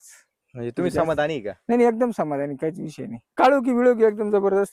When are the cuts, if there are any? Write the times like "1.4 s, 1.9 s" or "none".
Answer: 3.3 s